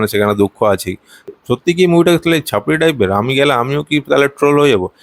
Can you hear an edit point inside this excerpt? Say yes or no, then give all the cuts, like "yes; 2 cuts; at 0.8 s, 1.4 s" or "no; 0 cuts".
yes; 1 cut; at 1.3 s